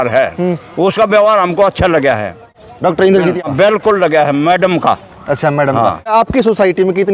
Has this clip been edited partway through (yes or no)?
no